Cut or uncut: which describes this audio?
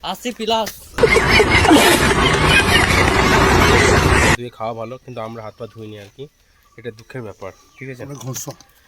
cut